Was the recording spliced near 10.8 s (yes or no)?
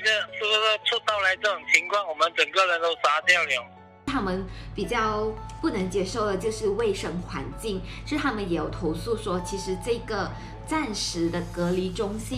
no